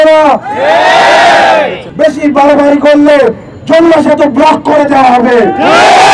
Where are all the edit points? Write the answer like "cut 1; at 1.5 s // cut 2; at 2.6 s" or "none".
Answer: cut 1; at 1.8 s